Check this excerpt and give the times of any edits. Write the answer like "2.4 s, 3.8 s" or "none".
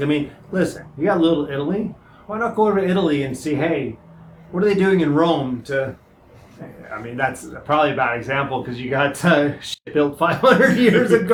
none